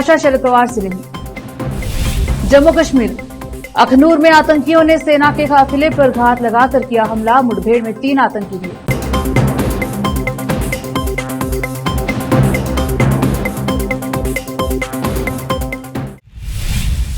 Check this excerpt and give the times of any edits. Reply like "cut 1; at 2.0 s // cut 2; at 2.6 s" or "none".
cut 1; at 16.2 s